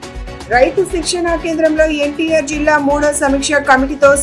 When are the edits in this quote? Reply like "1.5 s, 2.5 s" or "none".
none